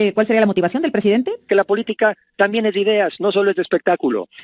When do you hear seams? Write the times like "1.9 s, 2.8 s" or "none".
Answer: 1.4 s